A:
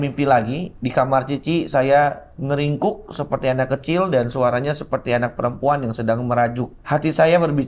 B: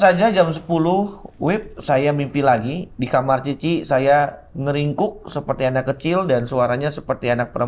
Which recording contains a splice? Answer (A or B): A